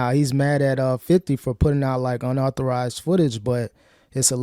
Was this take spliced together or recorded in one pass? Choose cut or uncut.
uncut